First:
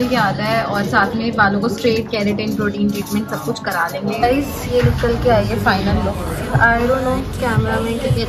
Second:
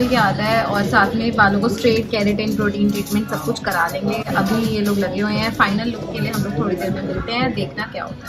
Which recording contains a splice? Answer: first; 1 cut; at 4.2 s

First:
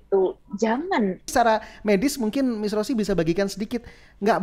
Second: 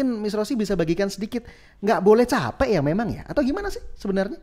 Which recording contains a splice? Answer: first; 1 cut; at 1.3 s

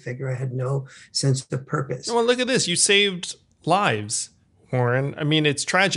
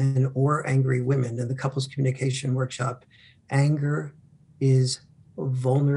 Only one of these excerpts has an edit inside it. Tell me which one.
first; 1 cut; at 4.6 s

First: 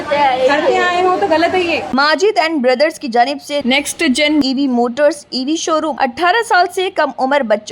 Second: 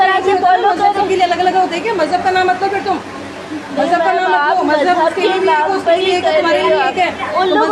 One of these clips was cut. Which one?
first; 2 cuts; at 1.9 s, 5.9 s

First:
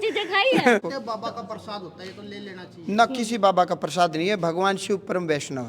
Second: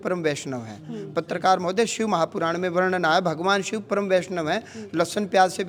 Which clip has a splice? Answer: first; 1 cut; at 0.9 s

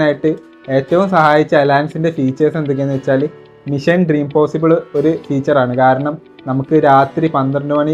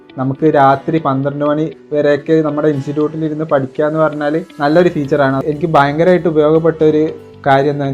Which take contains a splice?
second; 1 cut; at 5.4 s

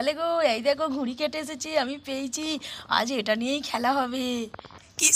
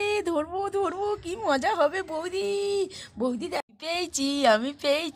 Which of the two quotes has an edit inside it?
second; 1 cut; at 3.6 s

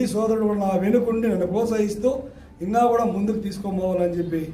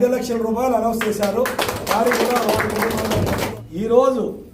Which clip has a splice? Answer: second; 1 cut; at 3.5 s

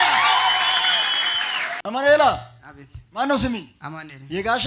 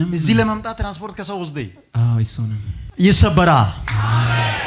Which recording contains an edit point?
first; 1 cut; at 1.7 s

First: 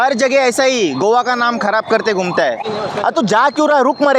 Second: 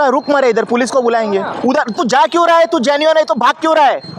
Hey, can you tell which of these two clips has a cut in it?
first; 1 cut; at 2.6 s

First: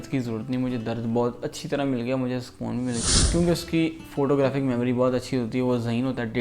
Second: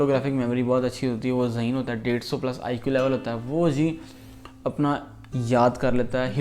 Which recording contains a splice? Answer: first; 1 cut; at 3.0 s

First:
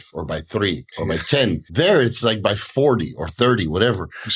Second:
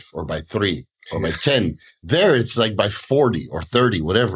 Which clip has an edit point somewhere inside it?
first; 1 cut; at 1.4 s

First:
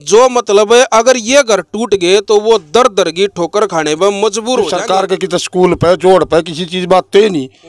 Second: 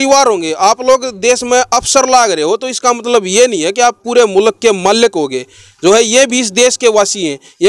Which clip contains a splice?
first; 1 cut; at 4.8 s

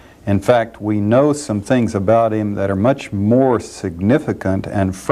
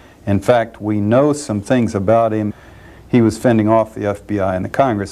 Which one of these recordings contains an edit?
first; 1 cut; at 2.5 s

